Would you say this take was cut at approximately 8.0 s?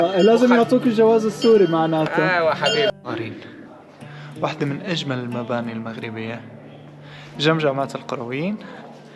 no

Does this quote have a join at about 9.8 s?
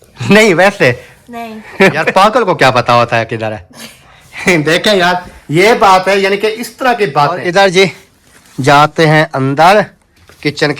no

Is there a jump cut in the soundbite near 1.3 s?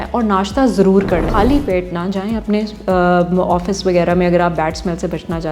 yes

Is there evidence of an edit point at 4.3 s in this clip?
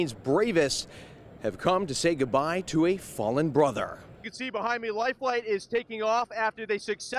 yes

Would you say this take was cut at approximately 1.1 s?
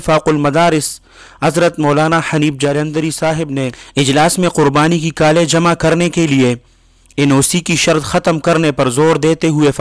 no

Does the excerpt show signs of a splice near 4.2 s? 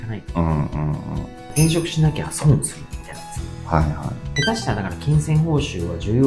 yes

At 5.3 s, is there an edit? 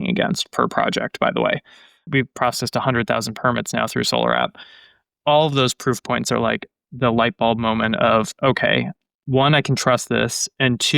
no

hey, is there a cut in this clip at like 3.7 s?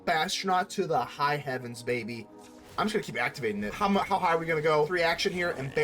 yes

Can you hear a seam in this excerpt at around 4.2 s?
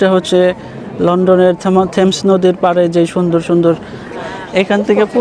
yes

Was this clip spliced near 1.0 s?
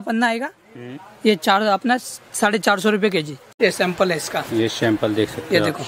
no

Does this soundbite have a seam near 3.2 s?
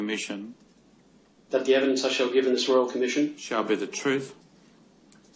yes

